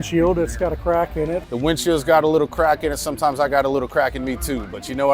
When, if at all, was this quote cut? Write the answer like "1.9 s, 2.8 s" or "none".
1.4 s